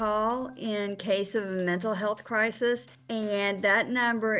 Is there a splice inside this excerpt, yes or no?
yes